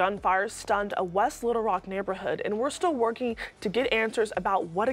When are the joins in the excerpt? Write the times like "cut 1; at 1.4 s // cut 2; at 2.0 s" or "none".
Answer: none